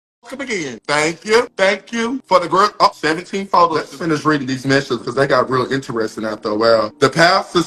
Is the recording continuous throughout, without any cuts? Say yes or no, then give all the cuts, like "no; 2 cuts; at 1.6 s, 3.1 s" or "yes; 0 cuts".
no; 1 cut; at 3.9 s